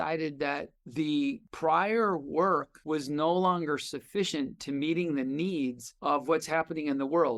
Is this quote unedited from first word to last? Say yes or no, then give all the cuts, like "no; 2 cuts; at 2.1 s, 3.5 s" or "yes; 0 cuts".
no; 2 cuts; at 1.5 s, 2.7 s